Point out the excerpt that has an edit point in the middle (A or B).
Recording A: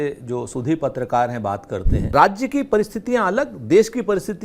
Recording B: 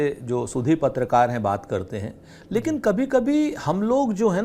A